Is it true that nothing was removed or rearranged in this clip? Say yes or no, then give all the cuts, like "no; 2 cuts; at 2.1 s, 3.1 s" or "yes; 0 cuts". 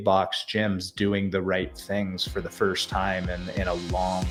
yes; 0 cuts